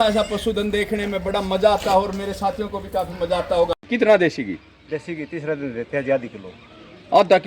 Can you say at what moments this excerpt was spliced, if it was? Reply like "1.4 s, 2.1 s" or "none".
3.9 s